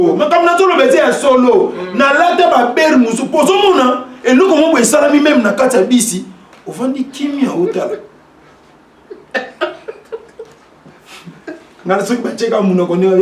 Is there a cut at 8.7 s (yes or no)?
no